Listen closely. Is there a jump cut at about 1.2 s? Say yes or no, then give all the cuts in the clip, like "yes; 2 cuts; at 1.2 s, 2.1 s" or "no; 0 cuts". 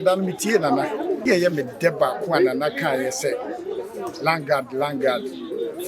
yes; 1 cut; at 1.2 s